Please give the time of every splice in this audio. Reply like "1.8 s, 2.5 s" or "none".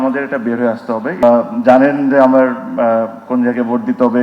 1.2 s